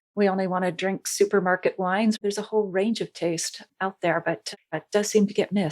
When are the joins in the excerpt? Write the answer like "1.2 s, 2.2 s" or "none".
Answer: 2.2 s, 4.7 s